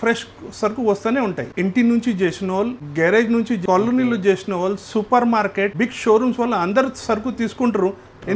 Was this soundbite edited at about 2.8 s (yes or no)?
yes